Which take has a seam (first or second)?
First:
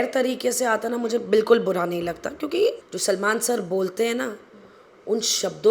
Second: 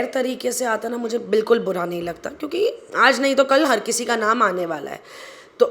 first